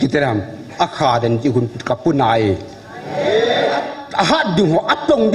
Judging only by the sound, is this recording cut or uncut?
cut